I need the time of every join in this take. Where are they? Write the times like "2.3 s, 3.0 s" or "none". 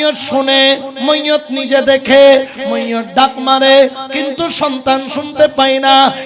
none